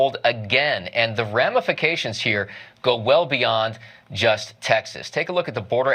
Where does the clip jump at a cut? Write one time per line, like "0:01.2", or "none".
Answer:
0:04.5